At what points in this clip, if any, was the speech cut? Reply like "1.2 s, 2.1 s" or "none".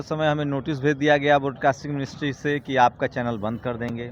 none